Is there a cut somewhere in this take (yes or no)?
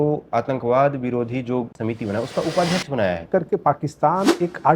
yes